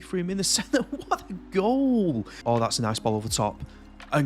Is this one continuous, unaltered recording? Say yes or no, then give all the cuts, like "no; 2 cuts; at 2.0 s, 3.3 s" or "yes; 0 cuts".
no; 1 cut; at 2.4 s